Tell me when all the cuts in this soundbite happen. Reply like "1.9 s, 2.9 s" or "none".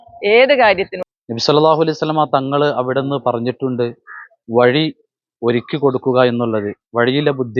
1.0 s